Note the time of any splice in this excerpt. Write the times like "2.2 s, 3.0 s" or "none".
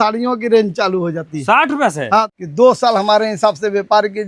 2.3 s